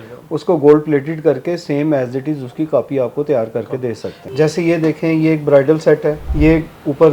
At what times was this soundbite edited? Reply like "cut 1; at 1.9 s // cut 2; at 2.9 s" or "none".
cut 1; at 4.2 s // cut 2; at 6.2 s

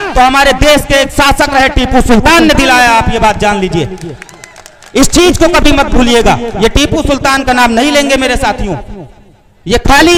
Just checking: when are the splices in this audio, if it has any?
none

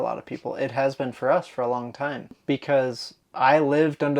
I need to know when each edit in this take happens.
cut 1; at 2.3 s

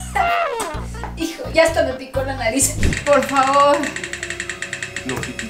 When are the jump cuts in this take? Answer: cut 1; at 2.8 s

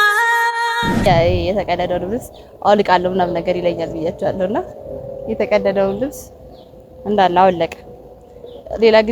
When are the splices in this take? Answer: cut 1; at 1.1 s

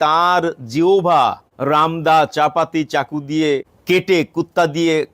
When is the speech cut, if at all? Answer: cut 1; at 1.5 s // cut 2; at 3.7 s

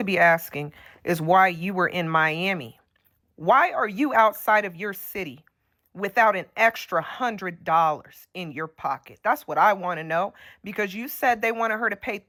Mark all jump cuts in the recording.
none

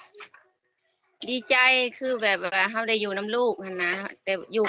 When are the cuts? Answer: none

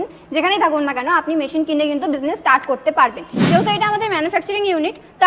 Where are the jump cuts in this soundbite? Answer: cut 1; at 3.3 s

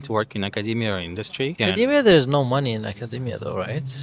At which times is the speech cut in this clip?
cut 1; at 1.6 s

